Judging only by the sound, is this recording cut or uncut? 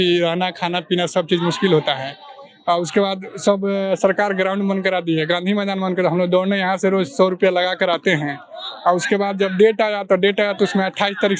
uncut